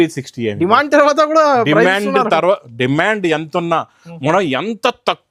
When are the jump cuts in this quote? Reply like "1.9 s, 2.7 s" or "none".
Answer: none

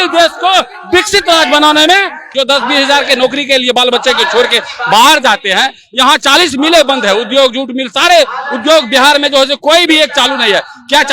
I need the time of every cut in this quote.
2.3 s

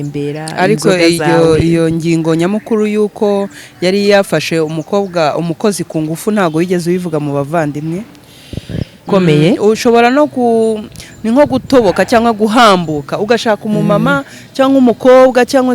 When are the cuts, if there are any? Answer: 9.0 s

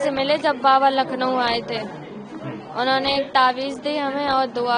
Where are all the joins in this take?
none

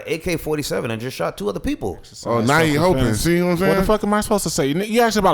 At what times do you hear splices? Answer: 2.1 s

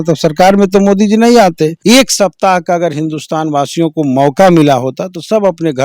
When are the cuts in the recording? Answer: 1.8 s

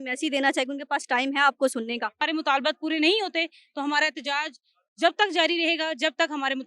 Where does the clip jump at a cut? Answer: 2.2 s

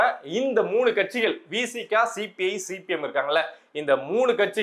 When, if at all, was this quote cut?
none

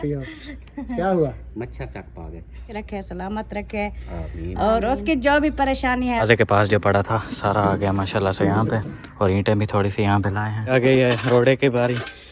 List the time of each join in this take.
2.7 s, 6.2 s, 10.7 s

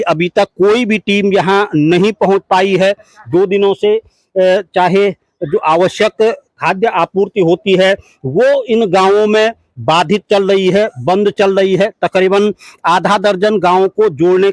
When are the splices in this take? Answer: none

